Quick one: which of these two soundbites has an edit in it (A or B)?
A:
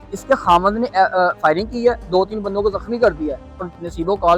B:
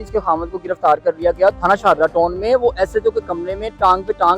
B